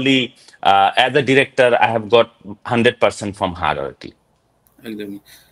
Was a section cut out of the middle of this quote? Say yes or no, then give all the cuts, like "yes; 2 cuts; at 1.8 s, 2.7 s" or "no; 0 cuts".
no; 0 cuts